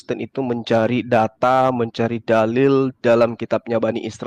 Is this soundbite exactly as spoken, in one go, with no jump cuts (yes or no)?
yes